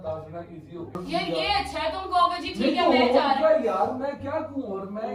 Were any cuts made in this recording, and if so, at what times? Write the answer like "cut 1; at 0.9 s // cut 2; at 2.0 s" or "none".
cut 1; at 1.0 s